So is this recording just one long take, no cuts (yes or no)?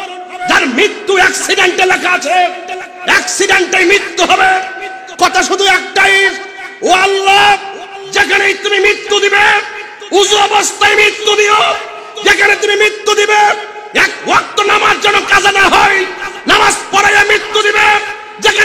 yes